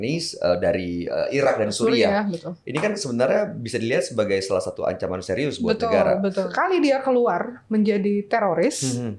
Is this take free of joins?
no; 1 cut; at 6.5 s

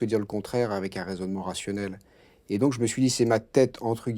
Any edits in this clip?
no; 0 cuts

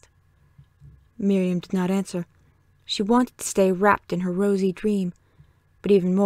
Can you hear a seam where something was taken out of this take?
no; 0 cuts

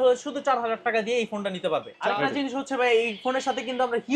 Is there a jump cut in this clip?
yes; 1 cut; at 1.9 s

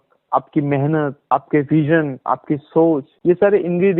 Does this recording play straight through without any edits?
no; 2 cuts; at 1.2 s, 3.1 s

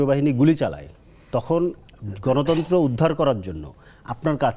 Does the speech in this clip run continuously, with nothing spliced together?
yes; 0 cuts

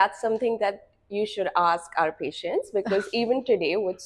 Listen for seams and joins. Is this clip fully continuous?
yes; 0 cuts

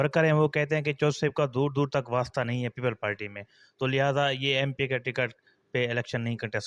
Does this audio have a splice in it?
no; 0 cuts

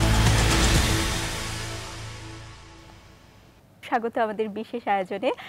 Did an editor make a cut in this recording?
yes; 1 cut; at 3.8 s

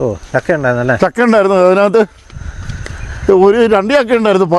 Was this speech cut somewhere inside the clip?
no; 0 cuts

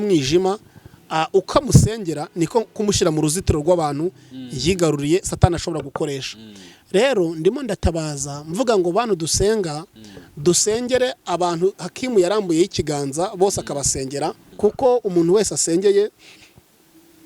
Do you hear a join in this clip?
yes; 1 cut; at 14.4 s

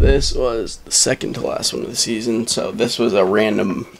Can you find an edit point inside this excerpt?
no; 0 cuts

